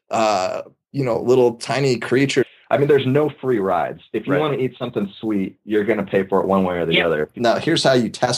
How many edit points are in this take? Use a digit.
2